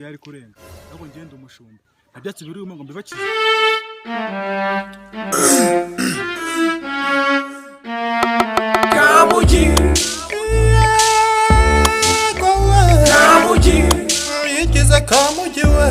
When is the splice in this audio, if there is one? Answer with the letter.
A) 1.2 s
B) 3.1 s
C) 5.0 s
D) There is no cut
B